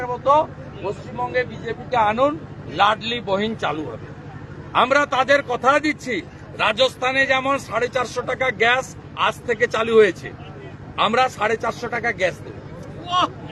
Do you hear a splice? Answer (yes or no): no